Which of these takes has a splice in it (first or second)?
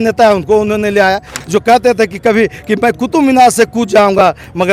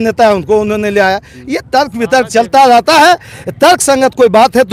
first